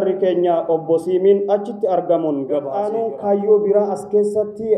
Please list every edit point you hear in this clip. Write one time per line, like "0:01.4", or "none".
0:02.8

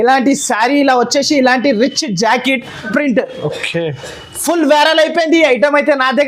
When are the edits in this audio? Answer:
0:02.9

